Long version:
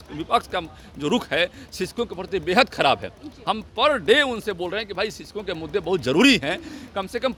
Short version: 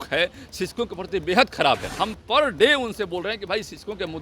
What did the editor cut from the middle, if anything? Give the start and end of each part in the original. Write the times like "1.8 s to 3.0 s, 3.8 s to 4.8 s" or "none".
3.1 s to 3.4 s